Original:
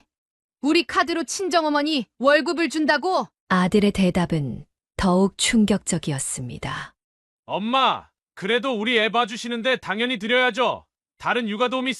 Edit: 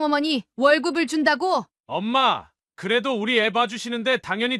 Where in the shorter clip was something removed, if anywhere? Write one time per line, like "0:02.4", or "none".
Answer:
0:01.7